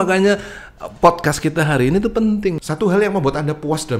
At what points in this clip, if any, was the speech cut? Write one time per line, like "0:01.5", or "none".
0:02.6